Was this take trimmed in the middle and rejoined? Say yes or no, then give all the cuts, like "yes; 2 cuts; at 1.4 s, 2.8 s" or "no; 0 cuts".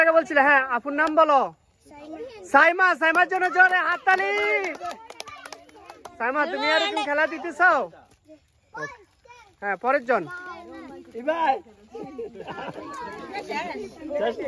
no; 0 cuts